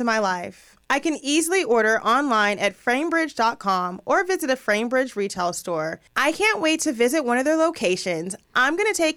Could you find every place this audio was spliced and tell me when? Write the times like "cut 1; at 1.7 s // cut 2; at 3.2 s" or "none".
cut 1; at 6.0 s